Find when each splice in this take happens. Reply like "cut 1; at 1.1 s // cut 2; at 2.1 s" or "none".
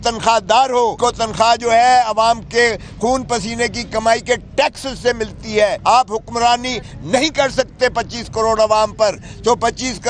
cut 1; at 1.0 s // cut 2; at 5.8 s